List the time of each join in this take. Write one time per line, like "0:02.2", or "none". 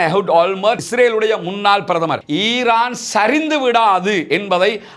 0:02.2